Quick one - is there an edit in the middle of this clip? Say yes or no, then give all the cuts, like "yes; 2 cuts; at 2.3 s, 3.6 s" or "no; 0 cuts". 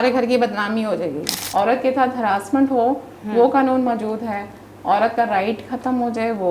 yes; 1 cut; at 1.3 s